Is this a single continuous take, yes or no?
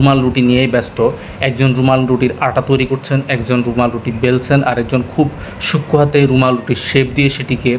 yes